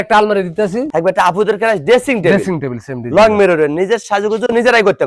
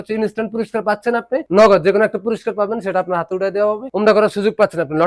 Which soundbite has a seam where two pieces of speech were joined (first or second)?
second